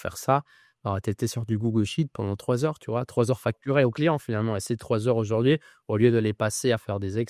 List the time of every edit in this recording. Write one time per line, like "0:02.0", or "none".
none